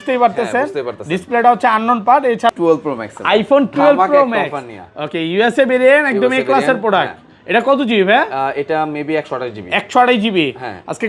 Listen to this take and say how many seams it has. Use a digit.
1